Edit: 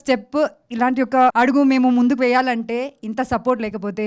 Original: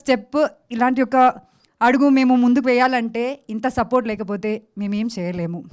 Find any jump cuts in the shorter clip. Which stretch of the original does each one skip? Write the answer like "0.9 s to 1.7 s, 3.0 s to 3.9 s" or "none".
1.3 s to 1.8 s